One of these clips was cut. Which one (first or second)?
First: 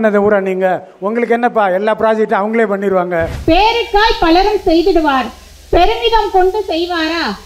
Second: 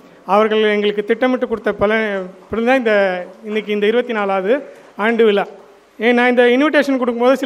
first